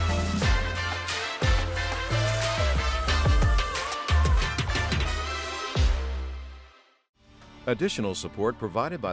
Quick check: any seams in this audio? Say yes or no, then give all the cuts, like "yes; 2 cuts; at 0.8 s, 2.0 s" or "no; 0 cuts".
yes; 1 cut; at 7.4 s